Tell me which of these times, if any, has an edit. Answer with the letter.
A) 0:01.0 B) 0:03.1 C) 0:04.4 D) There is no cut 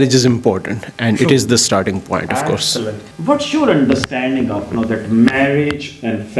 B